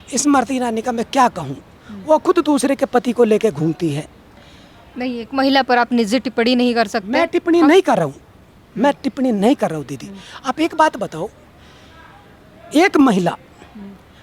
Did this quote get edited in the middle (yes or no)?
no